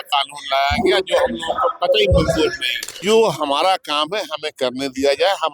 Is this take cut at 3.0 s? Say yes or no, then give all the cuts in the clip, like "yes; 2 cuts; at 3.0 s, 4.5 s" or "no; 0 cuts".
yes; 1 cut; at 3.0 s